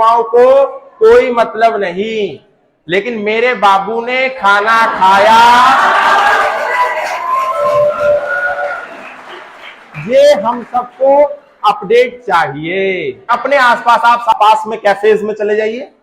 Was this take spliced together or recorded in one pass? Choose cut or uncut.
cut